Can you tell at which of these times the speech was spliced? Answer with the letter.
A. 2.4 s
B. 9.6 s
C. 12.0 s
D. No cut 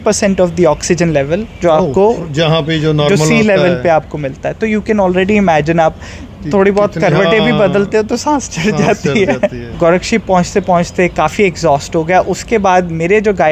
B